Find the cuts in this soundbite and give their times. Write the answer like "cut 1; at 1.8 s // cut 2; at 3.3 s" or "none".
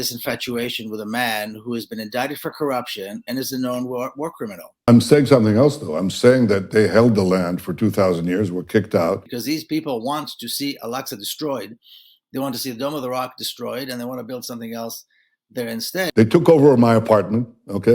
cut 1; at 4.9 s // cut 2; at 9.3 s // cut 3; at 16.0 s